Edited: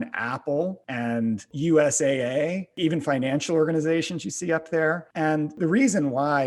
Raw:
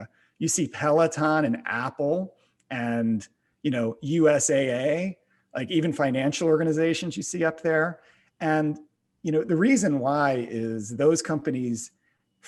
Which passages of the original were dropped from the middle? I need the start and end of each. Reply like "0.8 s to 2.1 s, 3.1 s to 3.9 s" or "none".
2.9 s to 3.9 s, 5.2 s to 5.6 s, 8.5 s to 9.4 s